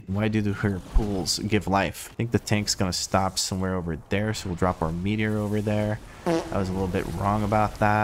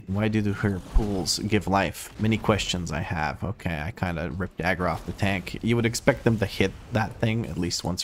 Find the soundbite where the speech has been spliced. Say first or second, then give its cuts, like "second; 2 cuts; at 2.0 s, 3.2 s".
first; 1 cut; at 2.1 s